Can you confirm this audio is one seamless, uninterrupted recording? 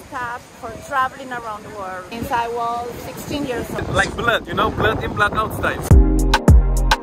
no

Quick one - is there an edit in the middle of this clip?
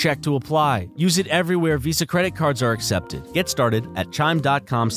yes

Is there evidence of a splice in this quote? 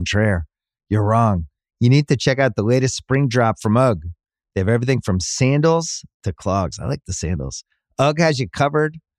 no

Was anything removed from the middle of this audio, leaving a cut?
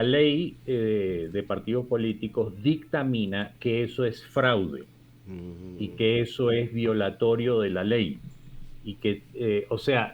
no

